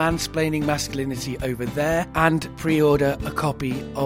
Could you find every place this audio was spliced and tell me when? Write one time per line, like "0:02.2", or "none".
0:02.3